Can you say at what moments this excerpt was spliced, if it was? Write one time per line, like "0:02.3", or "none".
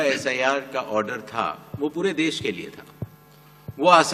none